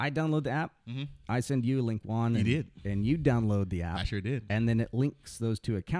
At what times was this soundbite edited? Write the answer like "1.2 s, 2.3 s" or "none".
none